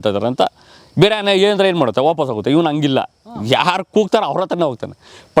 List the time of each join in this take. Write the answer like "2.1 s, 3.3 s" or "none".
none